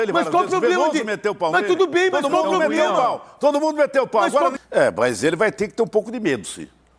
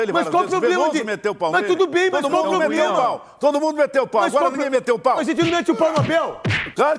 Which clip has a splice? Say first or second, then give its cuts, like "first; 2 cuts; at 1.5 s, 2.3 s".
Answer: first; 1 cut; at 4.6 s